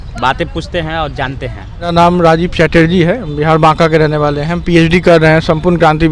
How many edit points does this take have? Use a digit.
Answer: 1